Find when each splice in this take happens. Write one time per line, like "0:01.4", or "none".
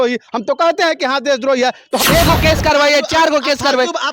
0:02.0